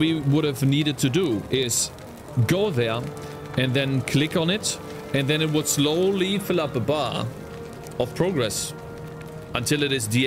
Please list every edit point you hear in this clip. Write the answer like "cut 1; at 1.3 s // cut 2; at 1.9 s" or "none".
none